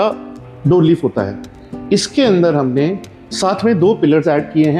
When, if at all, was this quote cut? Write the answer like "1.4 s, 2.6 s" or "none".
none